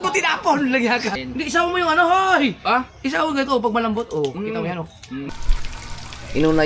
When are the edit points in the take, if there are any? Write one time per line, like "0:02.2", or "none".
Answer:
0:01.2
0:05.3